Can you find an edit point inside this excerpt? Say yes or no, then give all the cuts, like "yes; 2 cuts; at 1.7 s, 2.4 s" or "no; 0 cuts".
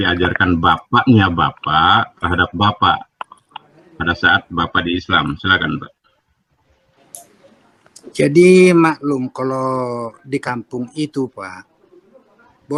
no; 0 cuts